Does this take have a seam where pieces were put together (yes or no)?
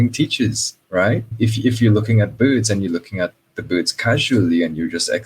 yes